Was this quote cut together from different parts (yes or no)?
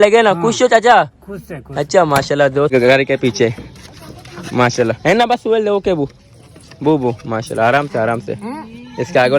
yes